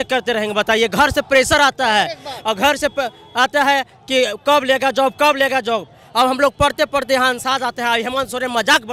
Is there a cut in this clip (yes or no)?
no